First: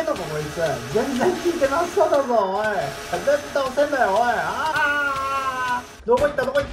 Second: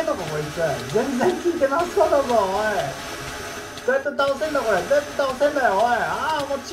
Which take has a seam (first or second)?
first